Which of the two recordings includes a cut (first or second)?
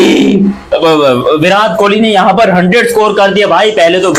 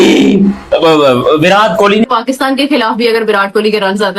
second